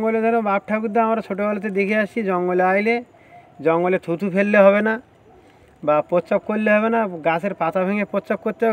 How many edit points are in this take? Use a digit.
0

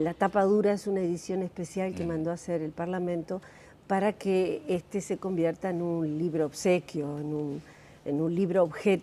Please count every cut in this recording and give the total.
0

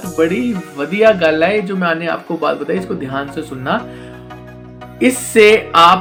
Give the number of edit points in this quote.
0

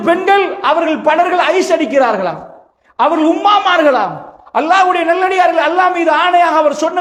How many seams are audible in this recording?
0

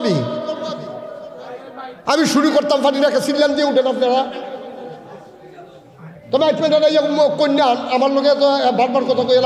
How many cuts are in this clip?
0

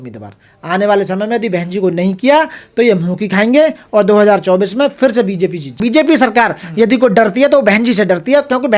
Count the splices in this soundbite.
1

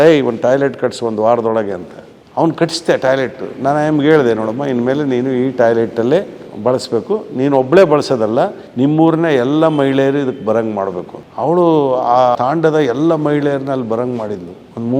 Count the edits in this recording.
2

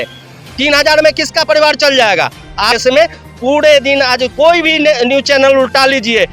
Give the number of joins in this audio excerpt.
1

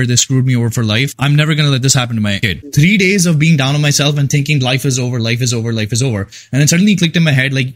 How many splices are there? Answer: 2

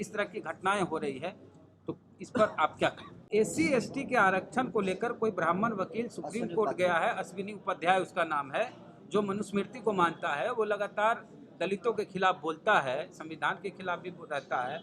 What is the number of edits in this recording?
1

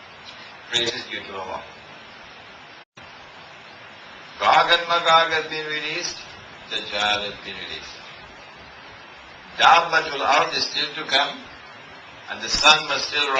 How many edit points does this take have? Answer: 0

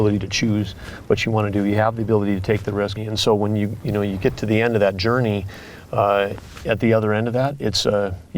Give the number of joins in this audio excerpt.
1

